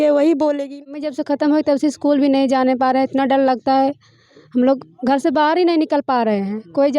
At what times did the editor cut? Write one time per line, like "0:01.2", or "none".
0:01.1